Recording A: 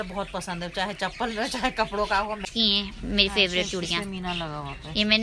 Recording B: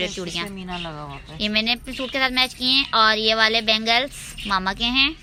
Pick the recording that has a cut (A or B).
A